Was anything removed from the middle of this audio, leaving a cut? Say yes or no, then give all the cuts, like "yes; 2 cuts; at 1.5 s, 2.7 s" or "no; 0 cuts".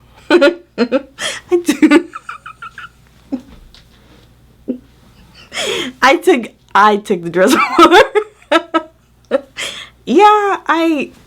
no; 0 cuts